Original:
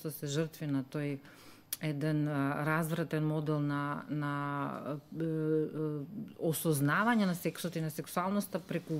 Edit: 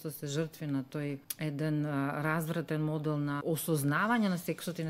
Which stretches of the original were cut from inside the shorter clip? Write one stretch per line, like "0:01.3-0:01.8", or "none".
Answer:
0:01.3-0:01.7
0:03.8-0:06.4